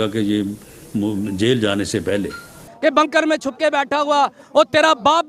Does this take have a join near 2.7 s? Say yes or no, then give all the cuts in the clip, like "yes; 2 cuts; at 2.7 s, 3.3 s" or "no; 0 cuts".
yes; 1 cut; at 2.7 s